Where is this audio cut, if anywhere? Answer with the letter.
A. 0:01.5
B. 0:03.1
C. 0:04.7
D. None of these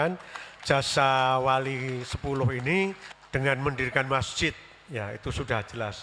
B